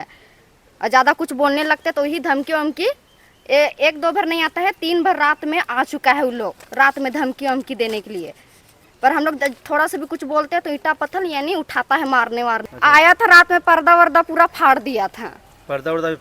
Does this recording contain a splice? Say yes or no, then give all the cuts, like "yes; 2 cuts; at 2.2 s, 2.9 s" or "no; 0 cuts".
yes; 1 cut; at 12.7 s